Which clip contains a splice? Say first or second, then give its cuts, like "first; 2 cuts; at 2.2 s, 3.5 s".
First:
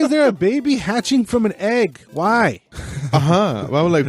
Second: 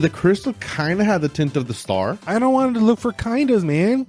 first; 1 cut; at 2.6 s